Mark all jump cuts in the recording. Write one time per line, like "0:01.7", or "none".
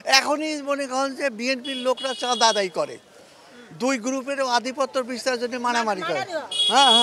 none